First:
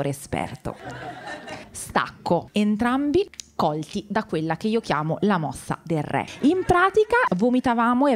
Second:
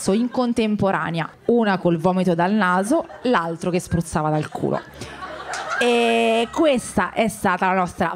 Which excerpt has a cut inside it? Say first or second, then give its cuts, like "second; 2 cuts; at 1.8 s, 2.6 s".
first; 3 cuts; at 2.5 s, 6.3 s, 7.3 s